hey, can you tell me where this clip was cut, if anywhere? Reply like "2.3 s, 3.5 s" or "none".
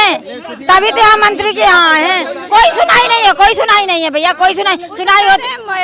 none

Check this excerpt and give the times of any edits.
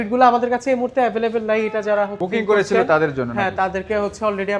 none

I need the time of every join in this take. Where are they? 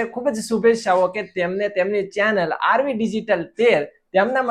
none

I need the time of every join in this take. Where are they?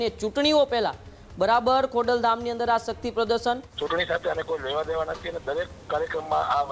3.7 s

